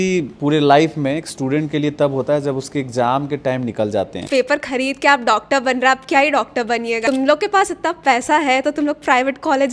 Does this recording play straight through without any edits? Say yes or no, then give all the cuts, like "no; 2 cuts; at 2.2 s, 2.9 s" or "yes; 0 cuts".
no; 2 cuts; at 4.2 s, 7.0 s